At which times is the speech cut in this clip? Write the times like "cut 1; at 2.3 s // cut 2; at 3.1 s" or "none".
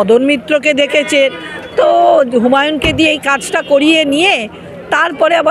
none